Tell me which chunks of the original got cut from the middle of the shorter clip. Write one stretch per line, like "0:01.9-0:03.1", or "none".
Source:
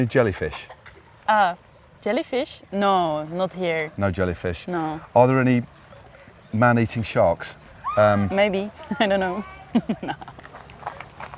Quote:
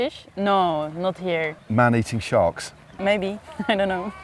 0:03.9-0:06.4
0:07.8-0:08.3

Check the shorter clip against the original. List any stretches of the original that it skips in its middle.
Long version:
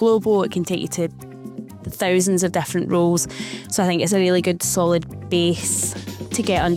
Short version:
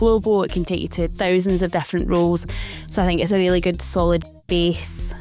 0:01.1-0:01.9

